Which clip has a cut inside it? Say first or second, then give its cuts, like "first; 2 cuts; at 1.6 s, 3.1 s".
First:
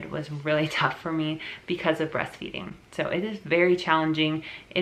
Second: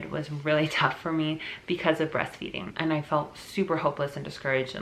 second; 1 cut; at 2.7 s